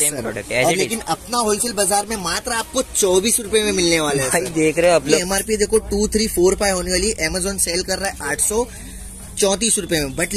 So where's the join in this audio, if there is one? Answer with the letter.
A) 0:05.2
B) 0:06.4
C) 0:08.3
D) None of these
A